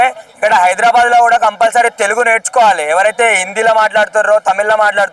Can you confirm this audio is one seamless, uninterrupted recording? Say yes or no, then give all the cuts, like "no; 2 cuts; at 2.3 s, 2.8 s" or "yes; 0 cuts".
yes; 0 cuts